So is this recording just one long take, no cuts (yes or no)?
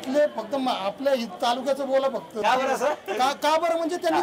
no